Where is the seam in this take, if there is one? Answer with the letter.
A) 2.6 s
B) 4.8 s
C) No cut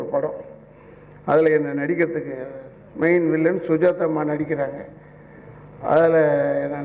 C